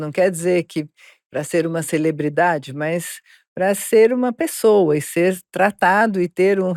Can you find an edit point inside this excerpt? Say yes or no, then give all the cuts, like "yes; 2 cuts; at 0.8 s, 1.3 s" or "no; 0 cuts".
no; 0 cuts